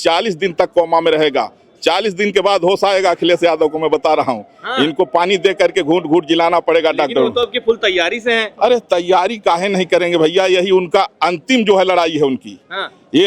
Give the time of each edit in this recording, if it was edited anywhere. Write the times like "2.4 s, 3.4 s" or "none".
none